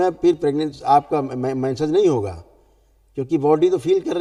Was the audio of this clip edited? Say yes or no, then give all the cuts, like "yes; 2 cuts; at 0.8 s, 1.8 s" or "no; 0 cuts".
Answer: no; 0 cuts